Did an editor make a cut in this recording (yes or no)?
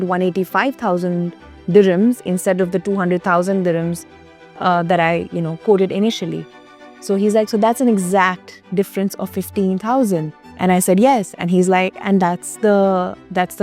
no